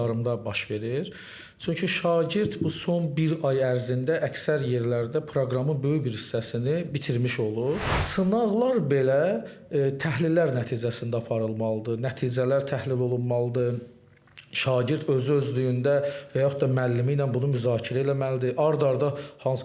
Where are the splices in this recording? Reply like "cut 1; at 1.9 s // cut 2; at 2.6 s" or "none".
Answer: cut 1; at 8.0 s